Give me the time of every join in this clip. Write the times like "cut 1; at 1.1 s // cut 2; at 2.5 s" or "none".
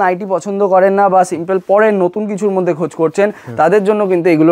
none